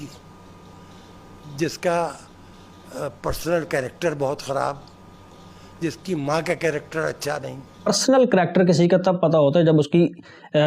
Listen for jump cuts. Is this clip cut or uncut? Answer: cut